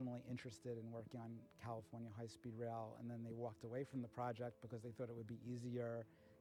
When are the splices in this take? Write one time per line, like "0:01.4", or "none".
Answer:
none